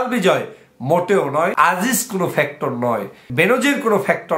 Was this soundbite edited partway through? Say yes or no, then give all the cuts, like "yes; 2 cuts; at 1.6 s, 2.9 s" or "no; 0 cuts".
yes; 2 cuts; at 1.5 s, 3.3 s